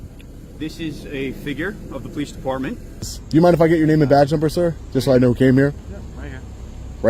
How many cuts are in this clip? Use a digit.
1